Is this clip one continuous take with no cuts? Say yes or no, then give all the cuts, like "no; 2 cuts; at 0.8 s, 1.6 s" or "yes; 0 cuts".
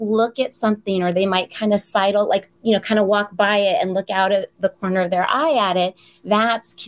yes; 0 cuts